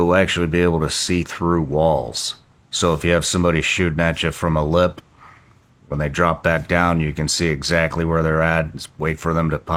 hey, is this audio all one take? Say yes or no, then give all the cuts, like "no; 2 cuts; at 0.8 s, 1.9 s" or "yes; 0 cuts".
yes; 0 cuts